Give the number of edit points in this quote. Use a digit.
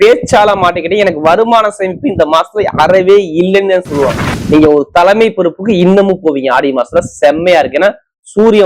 1